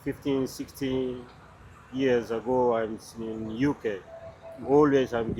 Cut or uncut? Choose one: uncut